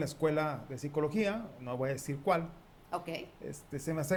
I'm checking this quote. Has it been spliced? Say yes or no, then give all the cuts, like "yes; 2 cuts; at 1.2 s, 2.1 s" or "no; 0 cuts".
no; 0 cuts